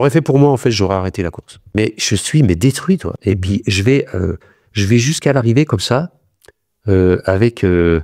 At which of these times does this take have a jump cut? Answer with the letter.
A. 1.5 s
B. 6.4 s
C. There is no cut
A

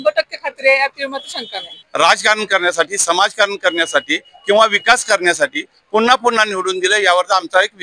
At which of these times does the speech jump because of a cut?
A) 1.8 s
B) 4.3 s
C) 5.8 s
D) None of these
A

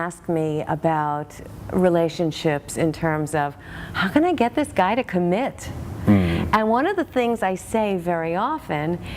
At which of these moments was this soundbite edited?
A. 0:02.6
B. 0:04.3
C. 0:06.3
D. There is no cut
D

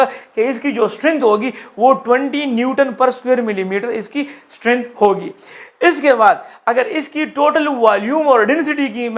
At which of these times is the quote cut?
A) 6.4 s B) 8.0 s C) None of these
C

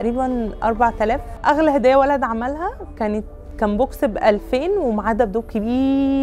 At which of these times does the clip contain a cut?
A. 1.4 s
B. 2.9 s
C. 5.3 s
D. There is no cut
A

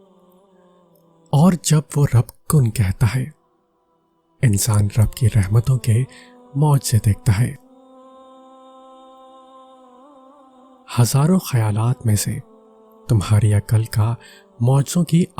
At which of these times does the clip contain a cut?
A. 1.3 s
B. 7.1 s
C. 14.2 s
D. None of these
A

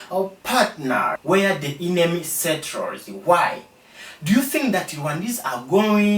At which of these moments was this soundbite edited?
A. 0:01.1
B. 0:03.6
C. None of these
A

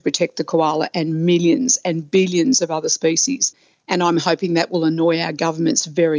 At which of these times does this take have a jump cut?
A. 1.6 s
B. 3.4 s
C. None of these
B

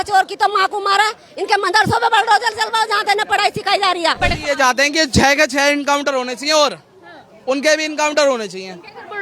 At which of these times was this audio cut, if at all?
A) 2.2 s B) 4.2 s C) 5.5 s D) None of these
B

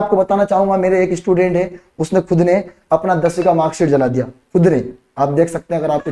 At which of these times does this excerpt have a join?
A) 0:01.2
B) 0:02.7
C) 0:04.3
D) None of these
D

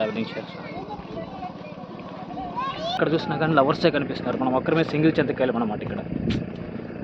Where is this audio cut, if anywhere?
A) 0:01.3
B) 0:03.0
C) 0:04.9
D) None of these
B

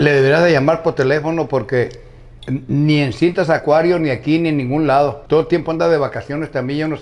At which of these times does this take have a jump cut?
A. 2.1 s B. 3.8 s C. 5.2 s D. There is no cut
C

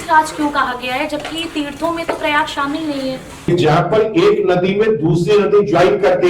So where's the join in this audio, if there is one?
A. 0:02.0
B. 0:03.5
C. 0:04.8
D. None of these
B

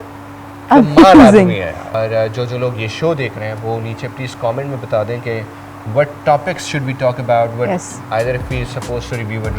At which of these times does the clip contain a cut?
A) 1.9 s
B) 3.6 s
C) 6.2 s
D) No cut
A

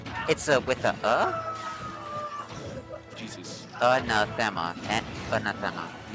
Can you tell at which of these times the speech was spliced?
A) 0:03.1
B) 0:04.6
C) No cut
C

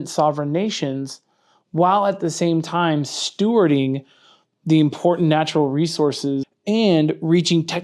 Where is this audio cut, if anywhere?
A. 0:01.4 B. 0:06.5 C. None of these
B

